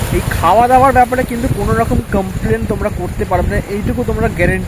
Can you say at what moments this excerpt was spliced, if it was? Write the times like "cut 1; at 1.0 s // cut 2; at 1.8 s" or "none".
none